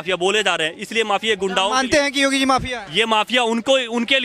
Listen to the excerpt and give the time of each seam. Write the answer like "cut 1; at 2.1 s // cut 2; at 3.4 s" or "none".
none